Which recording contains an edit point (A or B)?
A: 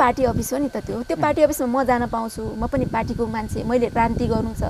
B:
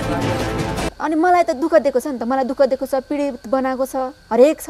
B